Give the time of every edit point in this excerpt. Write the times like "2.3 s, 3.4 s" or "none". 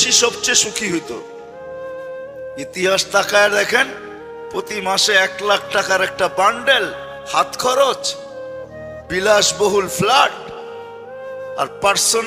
none